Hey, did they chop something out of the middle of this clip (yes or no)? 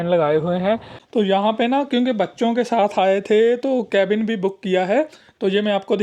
yes